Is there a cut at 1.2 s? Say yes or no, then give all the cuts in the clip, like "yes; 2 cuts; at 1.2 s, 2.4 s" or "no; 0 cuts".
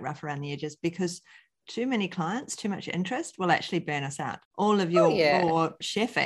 no; 1 cut; at 4.4 s